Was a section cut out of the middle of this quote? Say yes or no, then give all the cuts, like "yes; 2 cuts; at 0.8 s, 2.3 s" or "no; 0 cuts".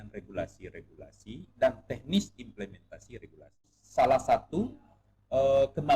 yes; 1 cut; at 3.7 s